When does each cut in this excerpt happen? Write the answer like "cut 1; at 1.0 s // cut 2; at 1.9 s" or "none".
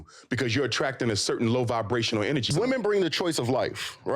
cut 1; at 2.5 s